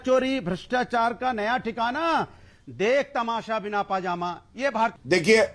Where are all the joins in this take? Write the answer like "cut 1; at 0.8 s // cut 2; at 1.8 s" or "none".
cut 1; at 4.6 s